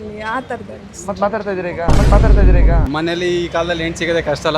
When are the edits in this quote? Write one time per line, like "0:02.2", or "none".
0:02.8

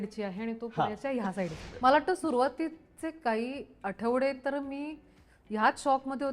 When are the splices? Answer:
0:01.6

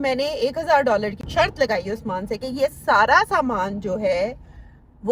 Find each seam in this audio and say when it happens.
none

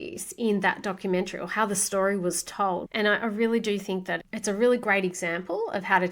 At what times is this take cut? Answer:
0:02.9

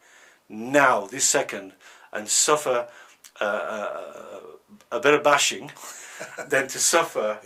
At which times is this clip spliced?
none

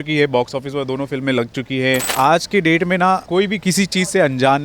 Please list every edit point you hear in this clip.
0:02.1
0:03.2

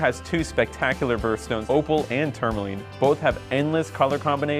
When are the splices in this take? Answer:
0:01.6

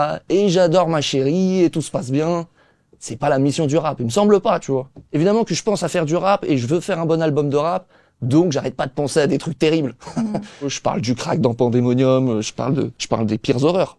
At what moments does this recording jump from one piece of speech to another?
0:05.0
0:10.7
0:13.0

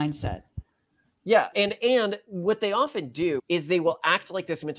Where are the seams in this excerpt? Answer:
0:03.4

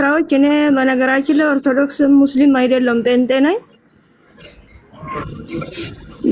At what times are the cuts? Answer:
none

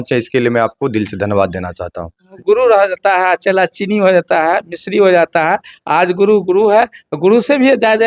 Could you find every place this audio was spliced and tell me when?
0:02.3

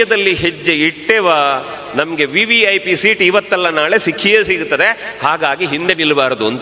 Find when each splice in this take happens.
none

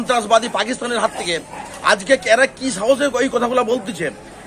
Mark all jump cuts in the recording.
none

